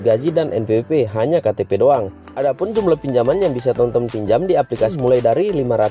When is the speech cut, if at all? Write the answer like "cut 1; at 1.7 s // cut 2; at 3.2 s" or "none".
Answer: cut 1; at 2.2 s // cut 2; at 4.9 s